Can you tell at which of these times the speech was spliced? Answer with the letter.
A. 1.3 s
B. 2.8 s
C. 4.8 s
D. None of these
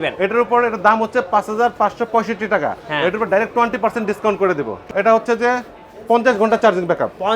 C